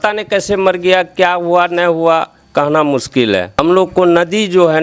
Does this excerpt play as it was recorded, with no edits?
no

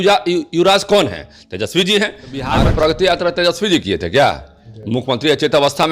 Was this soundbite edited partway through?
yes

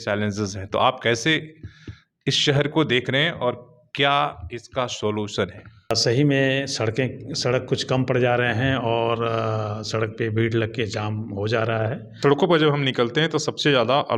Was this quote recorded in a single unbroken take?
no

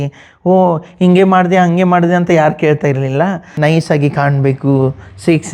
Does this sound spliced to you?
yes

